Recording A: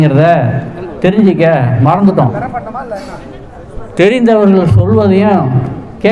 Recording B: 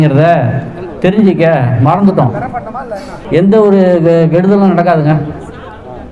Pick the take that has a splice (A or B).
B